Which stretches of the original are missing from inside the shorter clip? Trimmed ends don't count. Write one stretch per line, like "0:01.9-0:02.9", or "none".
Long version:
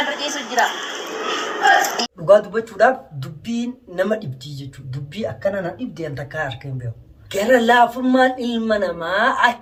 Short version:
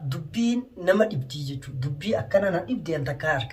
none